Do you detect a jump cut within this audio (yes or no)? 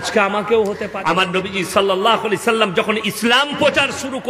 yes